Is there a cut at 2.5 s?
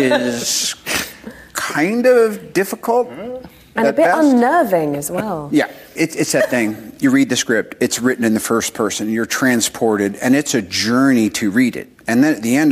no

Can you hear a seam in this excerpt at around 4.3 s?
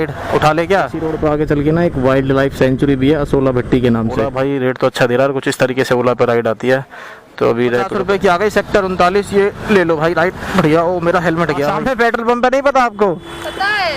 yes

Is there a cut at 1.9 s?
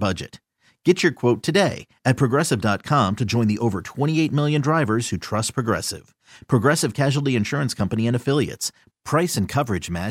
no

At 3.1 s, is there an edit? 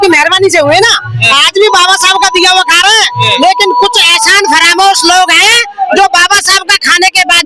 no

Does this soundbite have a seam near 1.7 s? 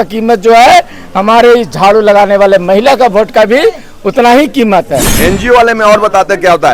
no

